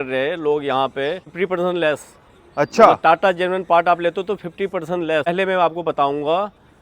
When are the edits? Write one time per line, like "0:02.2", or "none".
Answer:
0:01.3
0:05.3